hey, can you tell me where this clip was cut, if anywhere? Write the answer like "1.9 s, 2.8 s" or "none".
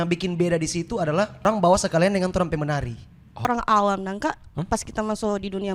1.4 s, 3.5 s, 4.6 s